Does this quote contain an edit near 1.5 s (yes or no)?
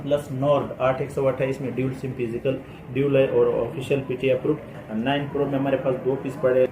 no